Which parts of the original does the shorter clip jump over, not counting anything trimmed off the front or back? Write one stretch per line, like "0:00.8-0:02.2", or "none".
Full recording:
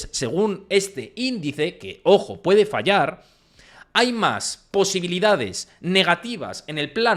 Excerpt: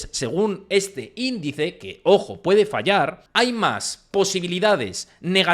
0:03.2-0:03.8